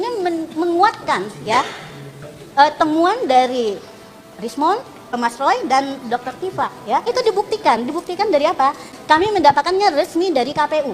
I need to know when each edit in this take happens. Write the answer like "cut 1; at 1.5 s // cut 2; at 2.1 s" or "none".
cut 1; at 5.2 s // cut 2; at 7.1 s // cut 3; at 8.9 s